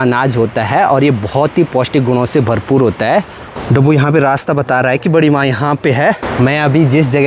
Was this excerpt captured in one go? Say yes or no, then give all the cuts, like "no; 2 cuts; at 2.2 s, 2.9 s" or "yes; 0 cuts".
no; 2 cuts; at 3.4 s, 6.2 s